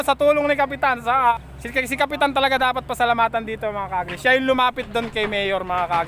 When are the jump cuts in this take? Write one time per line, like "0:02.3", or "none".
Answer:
0:01.5

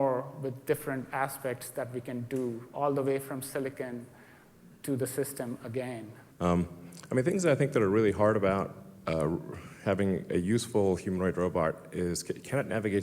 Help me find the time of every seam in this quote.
0:06.1

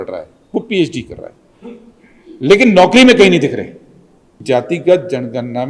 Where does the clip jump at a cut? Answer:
0:04.3

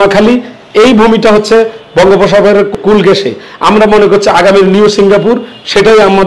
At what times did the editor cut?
0:02.7

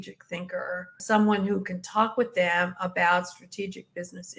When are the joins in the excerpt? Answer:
0:01.0

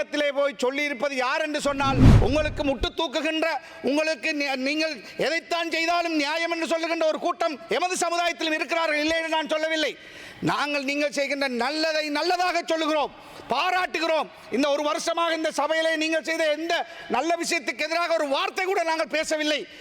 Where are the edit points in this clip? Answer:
0:02.1

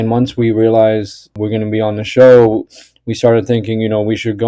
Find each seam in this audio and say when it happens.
0:01.3

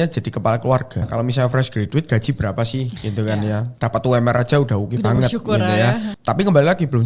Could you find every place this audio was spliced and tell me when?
0:01.1
0:03.7
0:06.1

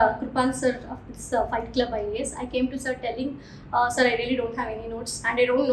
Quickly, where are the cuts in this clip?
none

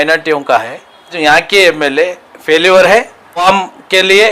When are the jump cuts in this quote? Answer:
0:01.1
0:03.4

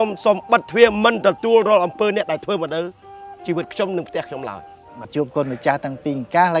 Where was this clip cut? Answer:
0:05.0

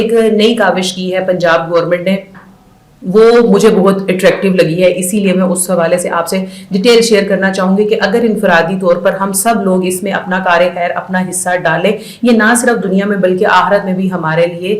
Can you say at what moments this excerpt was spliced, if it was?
none

